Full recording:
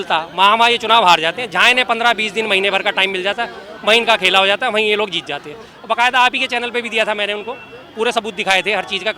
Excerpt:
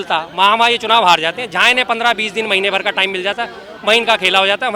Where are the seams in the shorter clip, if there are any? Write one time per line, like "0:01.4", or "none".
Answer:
none